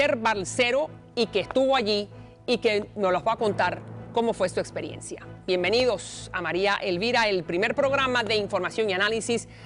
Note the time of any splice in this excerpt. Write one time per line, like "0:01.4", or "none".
none